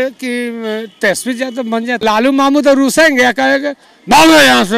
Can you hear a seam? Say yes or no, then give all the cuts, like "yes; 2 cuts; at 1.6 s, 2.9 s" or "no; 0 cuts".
yes; 1 cut; at 2.0 s